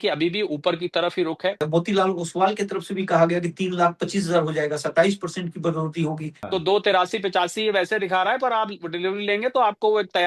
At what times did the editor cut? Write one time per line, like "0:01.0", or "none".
0:01.6
0:06.3